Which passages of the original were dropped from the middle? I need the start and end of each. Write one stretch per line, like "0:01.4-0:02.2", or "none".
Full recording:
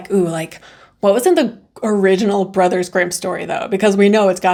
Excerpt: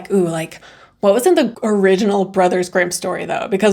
0:01.6-0:01.8